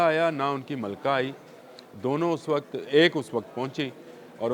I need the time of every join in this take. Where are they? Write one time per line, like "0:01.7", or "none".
none